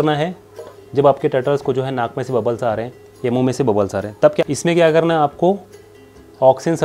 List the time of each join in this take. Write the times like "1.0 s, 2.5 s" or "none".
4.4 s